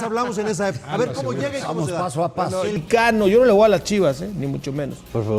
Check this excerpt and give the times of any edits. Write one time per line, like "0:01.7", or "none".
0:02.8